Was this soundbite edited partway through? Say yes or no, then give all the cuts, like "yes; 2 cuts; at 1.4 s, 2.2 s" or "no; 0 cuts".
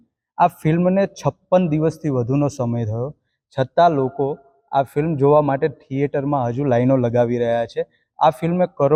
no; 0 cuts